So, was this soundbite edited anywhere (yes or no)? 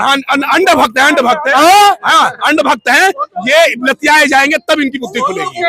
no